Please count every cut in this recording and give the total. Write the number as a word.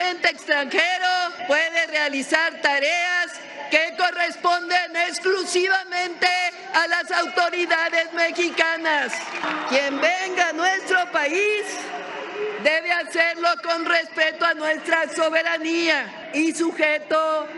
three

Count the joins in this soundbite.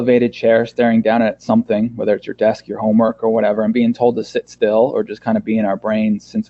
zero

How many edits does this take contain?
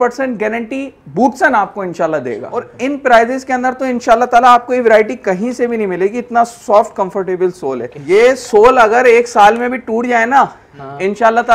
two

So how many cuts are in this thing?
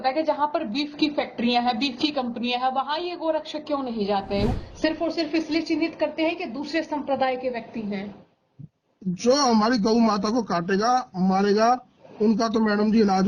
one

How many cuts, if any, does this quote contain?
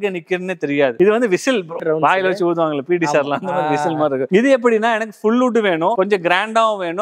two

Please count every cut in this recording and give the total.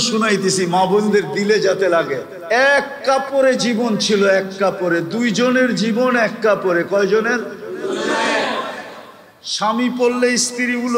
one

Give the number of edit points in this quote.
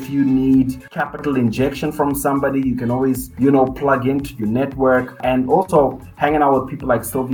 three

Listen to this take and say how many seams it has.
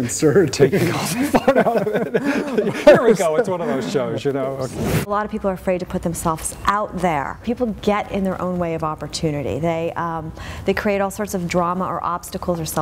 two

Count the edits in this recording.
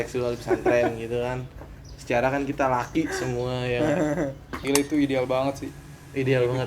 one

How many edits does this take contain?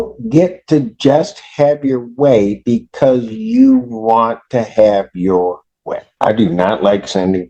one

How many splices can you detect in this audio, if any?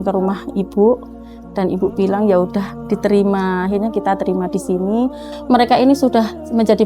one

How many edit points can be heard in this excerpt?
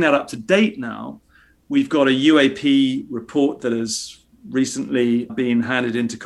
one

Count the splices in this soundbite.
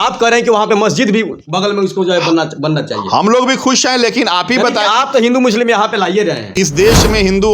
one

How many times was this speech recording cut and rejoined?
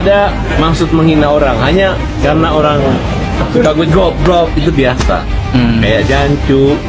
zero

